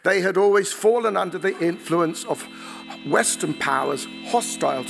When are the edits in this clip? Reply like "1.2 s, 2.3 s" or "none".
none